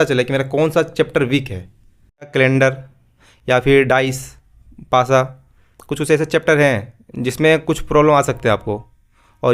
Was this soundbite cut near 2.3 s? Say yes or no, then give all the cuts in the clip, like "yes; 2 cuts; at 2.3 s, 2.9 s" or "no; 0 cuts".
yes; 1 cut; at 2.3 s